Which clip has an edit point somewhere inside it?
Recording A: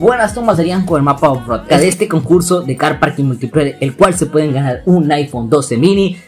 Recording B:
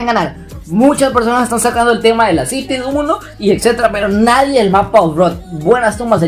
A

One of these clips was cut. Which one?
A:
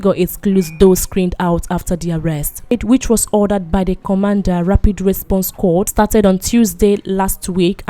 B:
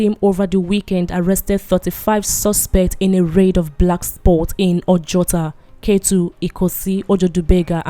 A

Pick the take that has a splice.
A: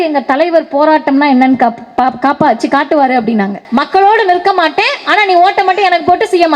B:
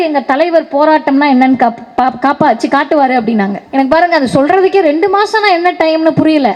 A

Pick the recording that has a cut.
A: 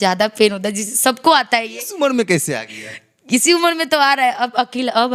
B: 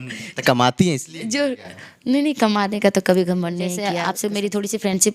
B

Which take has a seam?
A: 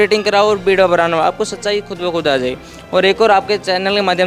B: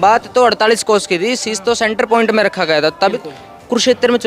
B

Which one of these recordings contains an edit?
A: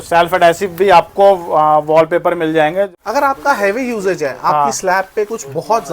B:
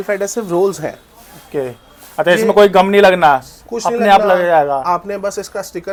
A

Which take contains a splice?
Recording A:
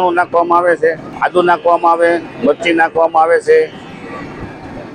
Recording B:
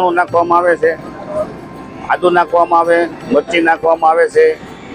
A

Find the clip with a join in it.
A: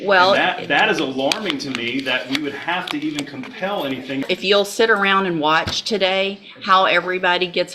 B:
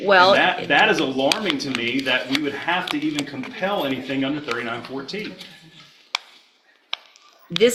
A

